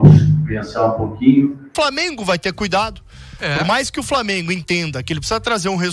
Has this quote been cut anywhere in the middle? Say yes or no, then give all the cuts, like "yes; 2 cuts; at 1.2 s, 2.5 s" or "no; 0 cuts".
yes; 1 cut; at 1.7 s